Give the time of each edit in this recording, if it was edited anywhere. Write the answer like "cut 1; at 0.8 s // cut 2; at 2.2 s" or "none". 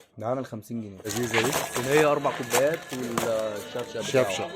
cut 1; at 1.1 s